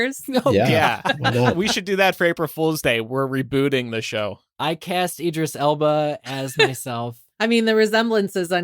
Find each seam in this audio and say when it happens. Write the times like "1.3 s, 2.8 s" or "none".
7.1 s